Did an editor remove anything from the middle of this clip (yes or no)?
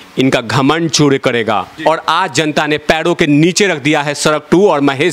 yes